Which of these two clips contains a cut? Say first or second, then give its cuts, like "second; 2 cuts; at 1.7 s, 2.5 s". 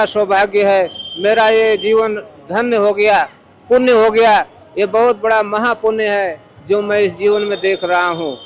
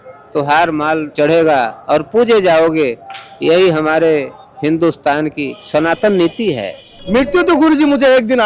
second; 1 cut; at 7.0 s